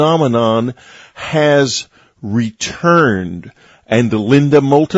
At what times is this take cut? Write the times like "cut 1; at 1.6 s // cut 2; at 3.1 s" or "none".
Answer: none